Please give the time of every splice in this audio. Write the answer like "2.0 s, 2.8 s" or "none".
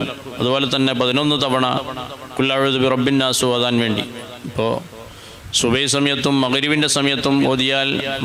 none